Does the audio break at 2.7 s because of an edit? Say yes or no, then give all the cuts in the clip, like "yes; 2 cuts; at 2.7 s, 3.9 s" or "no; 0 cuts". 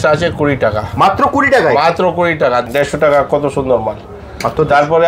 yes; 1 cut; at 2.7 s